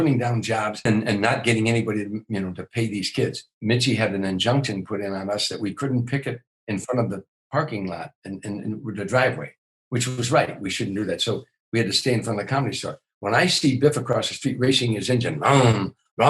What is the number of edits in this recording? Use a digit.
2